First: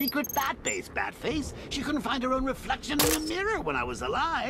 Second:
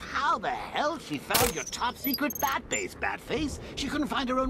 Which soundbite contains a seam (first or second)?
second